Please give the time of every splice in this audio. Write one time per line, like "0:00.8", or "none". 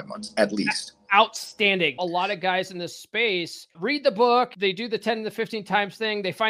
0:02.0
0:03.8
0:04.5